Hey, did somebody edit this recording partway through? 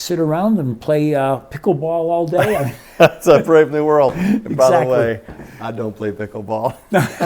no; 0 cuts

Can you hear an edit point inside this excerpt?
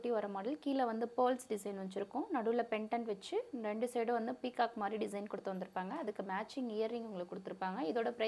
no; 0 cuts

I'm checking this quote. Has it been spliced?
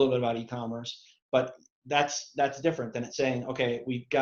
no; 0 cuts

